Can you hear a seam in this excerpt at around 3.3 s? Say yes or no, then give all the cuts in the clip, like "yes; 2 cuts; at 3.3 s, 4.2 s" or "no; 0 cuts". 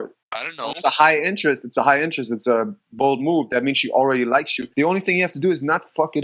no; 1 cut; at 4.6 s